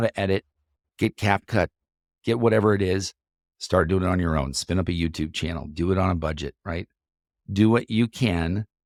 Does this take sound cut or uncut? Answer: uncut